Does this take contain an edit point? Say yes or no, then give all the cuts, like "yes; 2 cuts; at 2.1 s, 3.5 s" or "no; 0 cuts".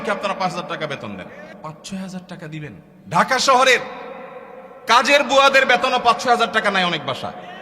yes; 2 cuts; at 1.5 s, 2.9 s